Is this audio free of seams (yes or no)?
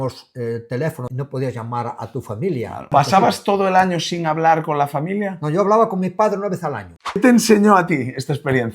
no